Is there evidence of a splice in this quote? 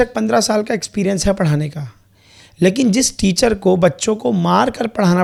no; 0 cuts

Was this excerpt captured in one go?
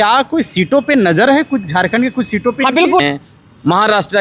no; 1 cut; at 3.0 s

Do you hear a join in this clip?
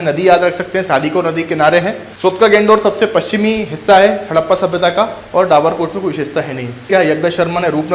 yes; 2 cuts; at 2.0 s, 6.9 s

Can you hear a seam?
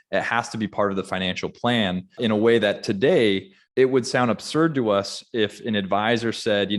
yes; 2 cuts; at 2.2 s, 3.6 s

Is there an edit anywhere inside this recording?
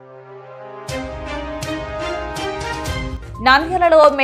yes; 1 cut; at 3.1 s

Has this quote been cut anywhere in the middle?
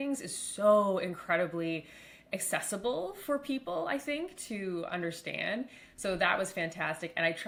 no; 0 cuts

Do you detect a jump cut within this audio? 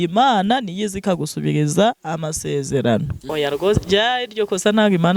yes; 1 cut; at 3.2 s

